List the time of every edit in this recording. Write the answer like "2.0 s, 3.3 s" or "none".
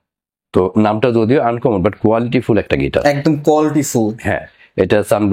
none